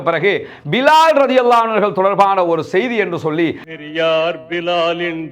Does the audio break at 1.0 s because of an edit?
no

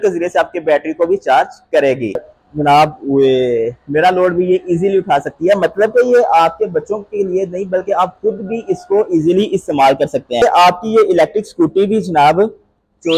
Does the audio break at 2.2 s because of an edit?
yes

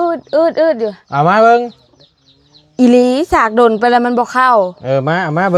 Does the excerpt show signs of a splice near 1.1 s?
no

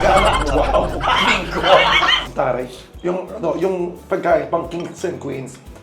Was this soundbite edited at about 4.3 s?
no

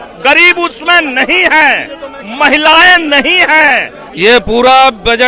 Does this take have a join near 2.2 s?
no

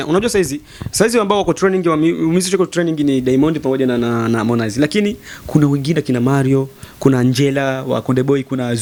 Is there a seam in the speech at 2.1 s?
no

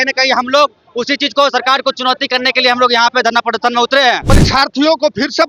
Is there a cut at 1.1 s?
no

